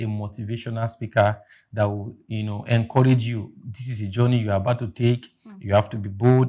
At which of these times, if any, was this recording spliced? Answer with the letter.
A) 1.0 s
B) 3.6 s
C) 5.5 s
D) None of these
D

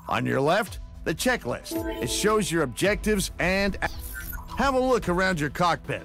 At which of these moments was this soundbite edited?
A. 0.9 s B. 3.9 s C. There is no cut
B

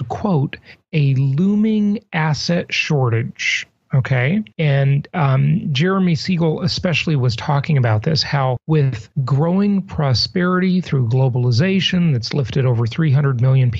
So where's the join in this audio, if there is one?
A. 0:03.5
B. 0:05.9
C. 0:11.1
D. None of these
B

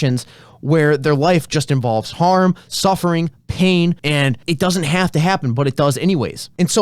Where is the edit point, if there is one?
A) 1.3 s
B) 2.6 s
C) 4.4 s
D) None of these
C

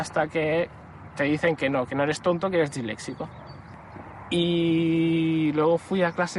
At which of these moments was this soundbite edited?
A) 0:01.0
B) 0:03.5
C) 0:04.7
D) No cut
D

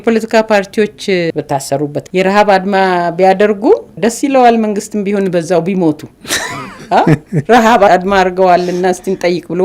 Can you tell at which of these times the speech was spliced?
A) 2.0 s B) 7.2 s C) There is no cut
A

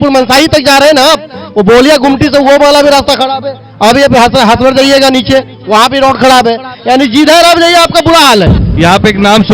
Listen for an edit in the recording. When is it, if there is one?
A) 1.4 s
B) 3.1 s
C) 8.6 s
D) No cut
C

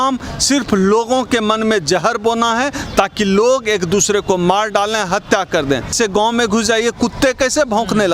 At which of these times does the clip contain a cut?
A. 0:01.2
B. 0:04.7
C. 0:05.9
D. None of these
C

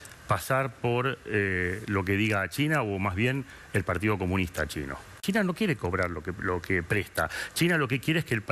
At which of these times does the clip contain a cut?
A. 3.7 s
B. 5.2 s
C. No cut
B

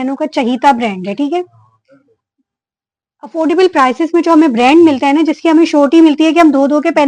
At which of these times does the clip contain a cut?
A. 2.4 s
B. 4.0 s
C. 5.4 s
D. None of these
D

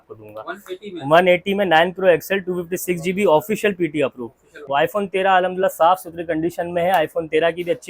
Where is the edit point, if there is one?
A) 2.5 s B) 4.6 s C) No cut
B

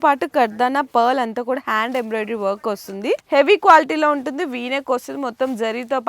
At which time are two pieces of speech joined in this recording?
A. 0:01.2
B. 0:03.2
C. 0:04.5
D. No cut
B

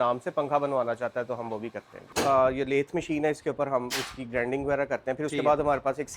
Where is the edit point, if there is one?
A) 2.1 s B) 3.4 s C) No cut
A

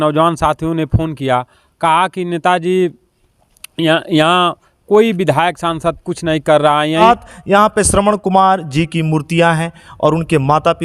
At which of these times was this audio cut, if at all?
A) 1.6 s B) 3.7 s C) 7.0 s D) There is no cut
C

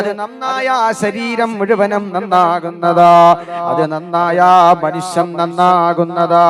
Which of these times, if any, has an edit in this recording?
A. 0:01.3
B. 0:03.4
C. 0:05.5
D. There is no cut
D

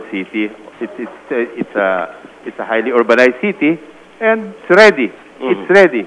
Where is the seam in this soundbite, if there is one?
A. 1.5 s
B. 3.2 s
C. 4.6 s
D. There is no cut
C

